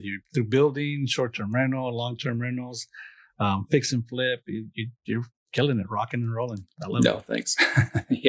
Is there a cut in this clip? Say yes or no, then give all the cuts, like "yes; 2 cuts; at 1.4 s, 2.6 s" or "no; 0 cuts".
no; 0 cuts